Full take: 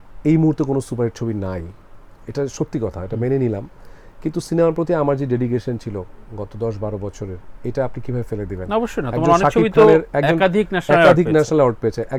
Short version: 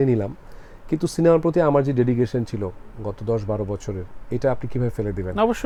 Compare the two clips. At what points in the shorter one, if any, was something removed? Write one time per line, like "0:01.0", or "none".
none

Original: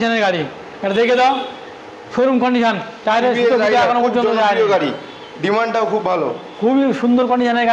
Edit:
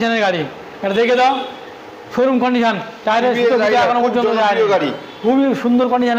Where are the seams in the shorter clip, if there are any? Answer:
0:05.1

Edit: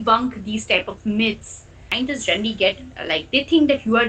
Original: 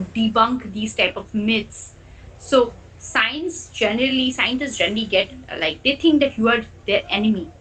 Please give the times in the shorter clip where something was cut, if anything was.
0:01.9

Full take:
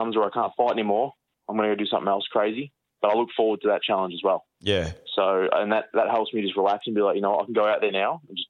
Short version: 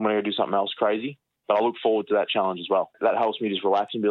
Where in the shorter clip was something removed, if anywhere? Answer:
0:02.9

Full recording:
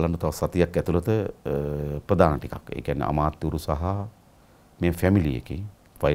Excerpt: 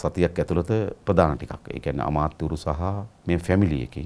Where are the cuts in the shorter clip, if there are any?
0:01.0
0:03.1

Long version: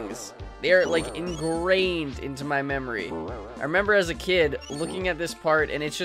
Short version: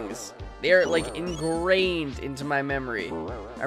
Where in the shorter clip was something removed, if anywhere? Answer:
none

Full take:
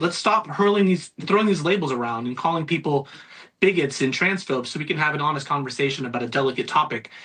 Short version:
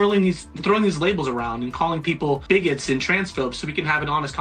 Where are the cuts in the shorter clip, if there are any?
0:02.4

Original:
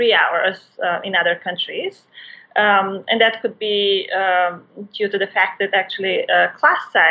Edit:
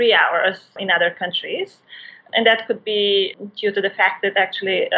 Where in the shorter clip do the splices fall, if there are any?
0:00.8
0:02.2
0:03.3

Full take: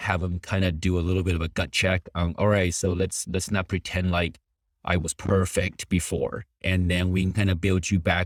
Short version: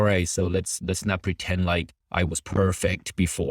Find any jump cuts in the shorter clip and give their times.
0:02.0

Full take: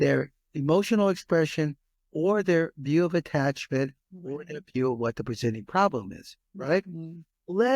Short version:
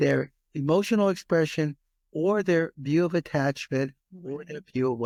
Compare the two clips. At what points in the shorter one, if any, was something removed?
none

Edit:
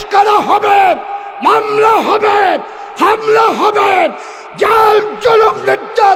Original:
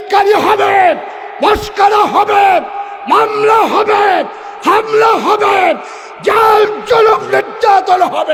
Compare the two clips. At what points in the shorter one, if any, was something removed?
none

